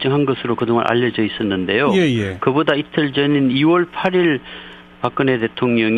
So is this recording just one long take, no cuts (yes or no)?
no